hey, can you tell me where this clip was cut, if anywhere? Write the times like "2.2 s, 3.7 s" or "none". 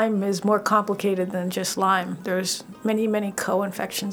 none

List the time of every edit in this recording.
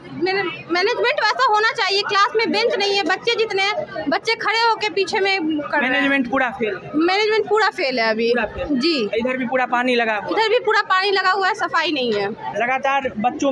none

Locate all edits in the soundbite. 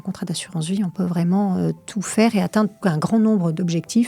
0.9 s, 2.8 s

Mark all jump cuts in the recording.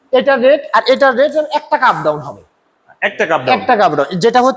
none

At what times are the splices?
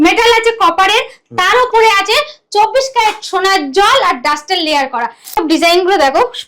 5.4 s

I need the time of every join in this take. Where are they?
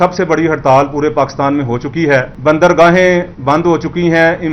2.3 s, 3.3 s

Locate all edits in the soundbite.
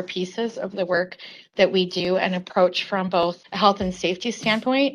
none

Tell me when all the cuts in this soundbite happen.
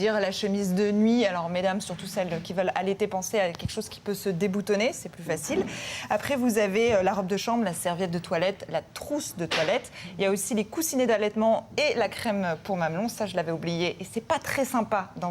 9.1 s

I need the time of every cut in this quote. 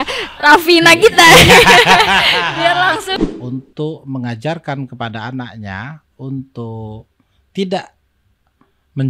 3.2 s

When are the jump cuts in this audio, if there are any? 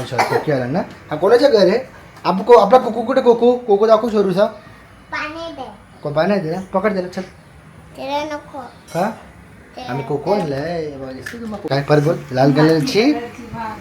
11.7 s

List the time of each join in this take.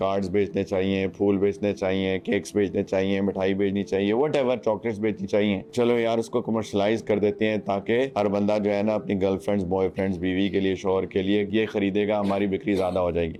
none

